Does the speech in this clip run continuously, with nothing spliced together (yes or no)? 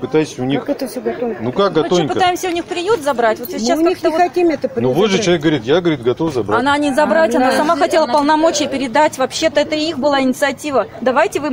yes